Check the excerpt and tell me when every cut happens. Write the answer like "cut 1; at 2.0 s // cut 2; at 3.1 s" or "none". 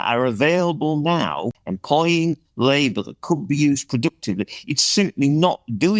cut 1; at 1.6 s